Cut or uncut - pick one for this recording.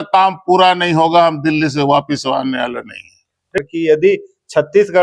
cut